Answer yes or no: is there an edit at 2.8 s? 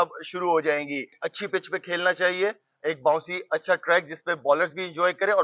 no